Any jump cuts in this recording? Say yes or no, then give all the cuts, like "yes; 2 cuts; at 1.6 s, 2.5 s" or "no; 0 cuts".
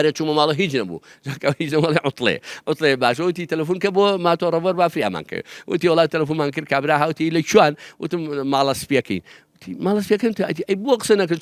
no; 0 cuts